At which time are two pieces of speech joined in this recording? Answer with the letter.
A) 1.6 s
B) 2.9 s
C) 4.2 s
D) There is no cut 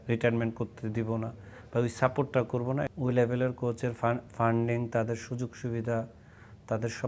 B